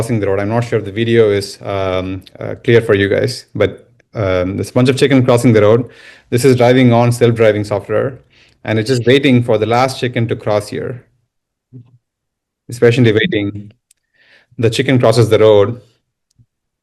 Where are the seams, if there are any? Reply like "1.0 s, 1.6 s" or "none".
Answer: none